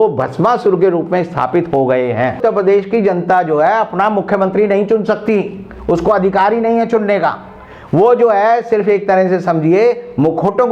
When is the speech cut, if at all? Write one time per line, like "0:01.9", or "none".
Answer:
0:02.4